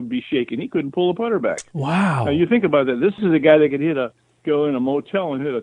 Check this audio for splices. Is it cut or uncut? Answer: cut